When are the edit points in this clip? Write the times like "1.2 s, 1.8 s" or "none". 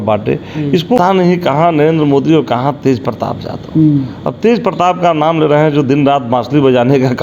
1.0 s